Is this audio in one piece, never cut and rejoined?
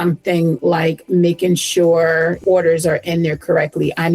no; 1 cut; at 2.4 s

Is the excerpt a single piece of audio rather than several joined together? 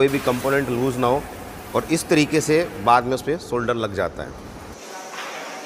no; 1 cut; at 4.8 s

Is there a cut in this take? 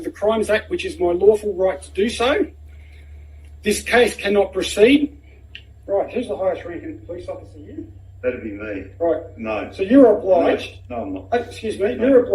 no; 0 cuts

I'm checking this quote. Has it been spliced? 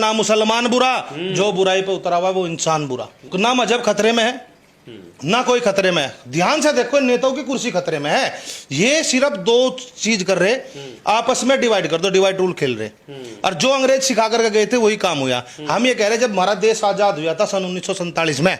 no; 0 cuts

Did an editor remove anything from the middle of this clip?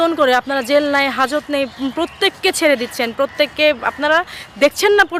no; 0 cuts

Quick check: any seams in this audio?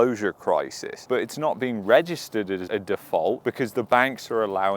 yes; 2 cuts; at 0.9 s, 2.6 s

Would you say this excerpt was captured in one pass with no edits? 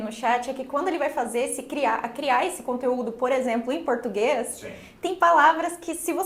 yes; 0 cuts

